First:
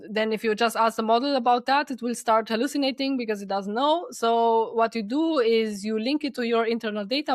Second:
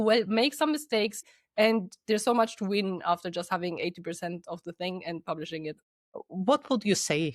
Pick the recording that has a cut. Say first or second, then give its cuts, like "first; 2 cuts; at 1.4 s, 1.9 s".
second; 2 cuts; at 1.3 s, 5.8 s